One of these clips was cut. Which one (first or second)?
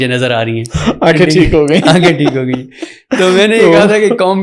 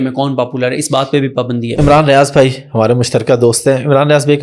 second